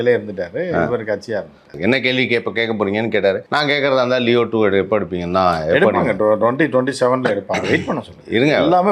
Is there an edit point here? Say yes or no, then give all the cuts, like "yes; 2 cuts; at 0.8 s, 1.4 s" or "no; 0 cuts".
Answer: yes; 2 cuts; at 1.8 s, 3.4 s